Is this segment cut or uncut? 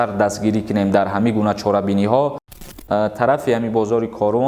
cut